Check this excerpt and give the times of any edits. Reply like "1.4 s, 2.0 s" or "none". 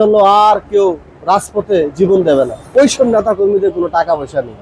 2.6 s